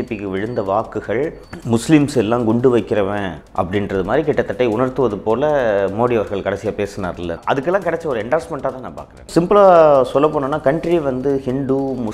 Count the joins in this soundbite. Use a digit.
3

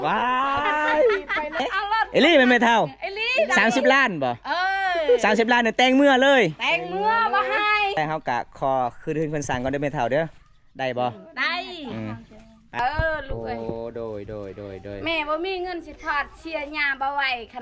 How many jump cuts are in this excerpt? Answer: 3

